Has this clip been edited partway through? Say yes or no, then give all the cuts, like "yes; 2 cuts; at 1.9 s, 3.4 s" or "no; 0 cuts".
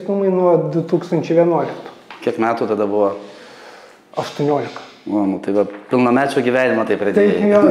no; 0 cuts